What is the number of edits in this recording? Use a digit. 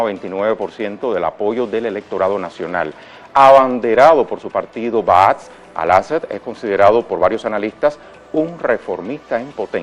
1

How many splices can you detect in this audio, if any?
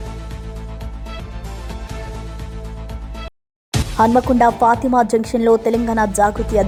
0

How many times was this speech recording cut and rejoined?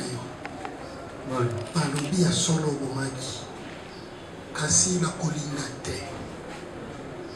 0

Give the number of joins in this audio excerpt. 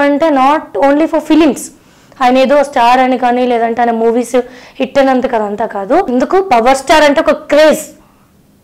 1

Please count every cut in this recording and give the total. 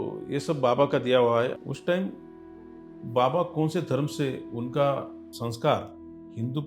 2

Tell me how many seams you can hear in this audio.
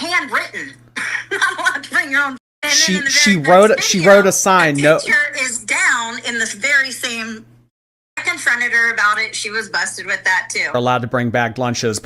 3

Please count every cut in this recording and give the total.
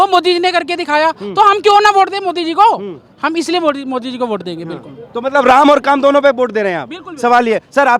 0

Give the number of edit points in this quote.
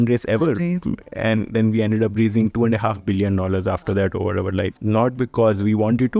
1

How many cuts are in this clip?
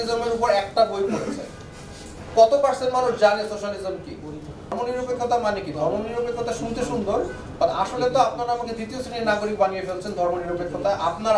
1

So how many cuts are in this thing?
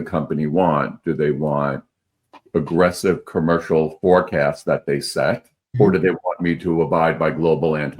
1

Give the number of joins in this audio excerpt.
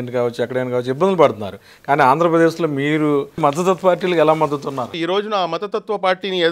2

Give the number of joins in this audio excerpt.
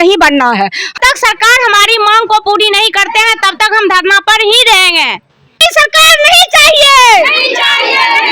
2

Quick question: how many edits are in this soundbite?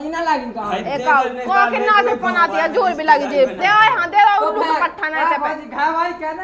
1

